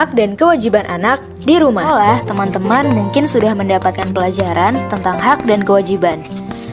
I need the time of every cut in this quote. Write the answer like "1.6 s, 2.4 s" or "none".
1.9 s